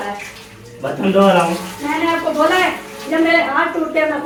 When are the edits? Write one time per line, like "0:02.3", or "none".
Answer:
none